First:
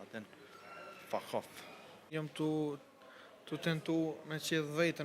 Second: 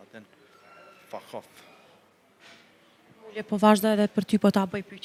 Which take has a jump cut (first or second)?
first